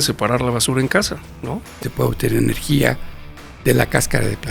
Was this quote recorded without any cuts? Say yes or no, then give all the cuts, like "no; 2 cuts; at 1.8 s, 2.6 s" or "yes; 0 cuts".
no; 1 cut; at 1.9 s